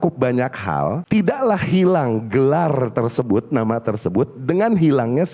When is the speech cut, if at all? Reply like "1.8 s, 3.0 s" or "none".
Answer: 1.0 s

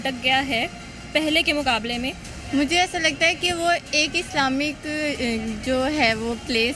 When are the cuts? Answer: 2.3 s

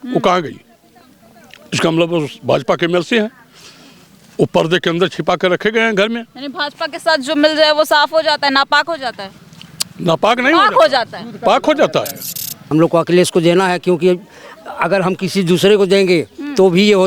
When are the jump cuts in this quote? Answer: 12.6 s

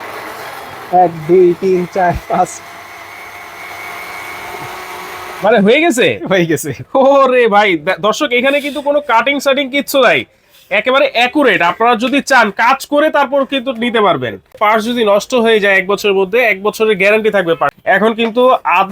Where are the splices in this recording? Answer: 14.6 s, 17.8 s

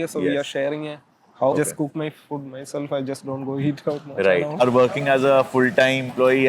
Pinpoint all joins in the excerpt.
1.5 s, 4.6 s

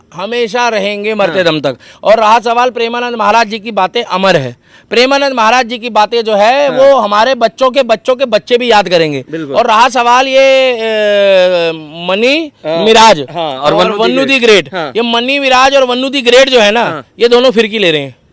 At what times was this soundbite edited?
none

